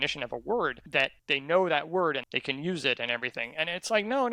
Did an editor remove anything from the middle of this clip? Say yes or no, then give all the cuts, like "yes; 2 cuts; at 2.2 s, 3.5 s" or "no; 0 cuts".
yes; 2 cuts; at 1.2 s, 2.2 s